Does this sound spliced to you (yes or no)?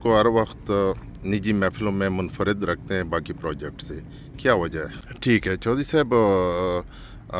yes